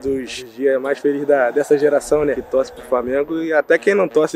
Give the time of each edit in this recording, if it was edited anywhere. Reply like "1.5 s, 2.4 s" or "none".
2.4 s